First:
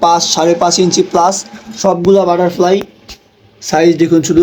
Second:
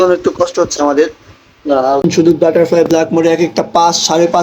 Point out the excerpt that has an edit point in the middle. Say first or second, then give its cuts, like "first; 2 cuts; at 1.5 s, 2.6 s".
second; 1 cut; at 2.0 s